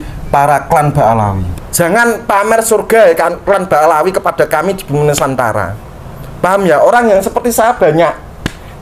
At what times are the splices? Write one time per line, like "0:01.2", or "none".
0:01.5